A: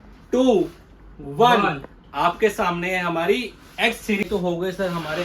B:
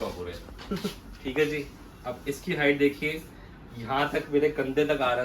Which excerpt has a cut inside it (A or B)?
A